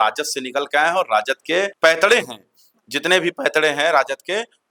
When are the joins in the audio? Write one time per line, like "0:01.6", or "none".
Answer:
none